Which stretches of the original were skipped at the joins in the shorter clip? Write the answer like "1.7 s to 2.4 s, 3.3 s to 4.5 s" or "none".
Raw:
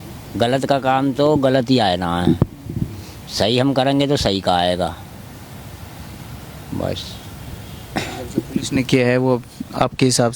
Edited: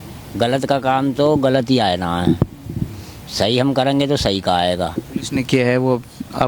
5.0 s to 8.4 s